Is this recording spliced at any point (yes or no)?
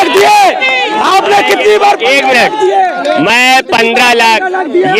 no